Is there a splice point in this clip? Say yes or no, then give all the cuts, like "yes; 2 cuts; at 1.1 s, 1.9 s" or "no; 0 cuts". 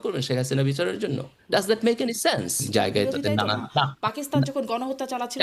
yes; 1 cut; at 2.6 s